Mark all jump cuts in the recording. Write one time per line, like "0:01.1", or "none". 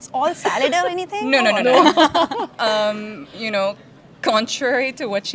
none